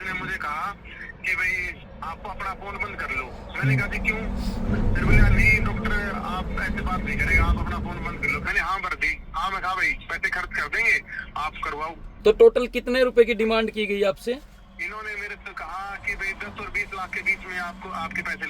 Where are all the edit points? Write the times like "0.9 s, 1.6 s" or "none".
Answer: 1.8 s, 8.5 s, 12.1 s